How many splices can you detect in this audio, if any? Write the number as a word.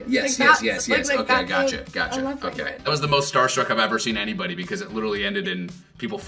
one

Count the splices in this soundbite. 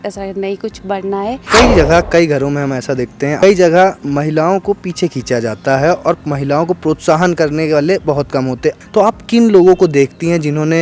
three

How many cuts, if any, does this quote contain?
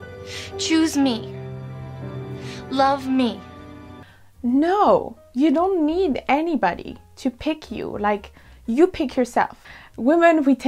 one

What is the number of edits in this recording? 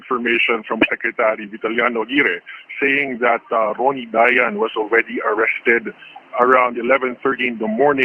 one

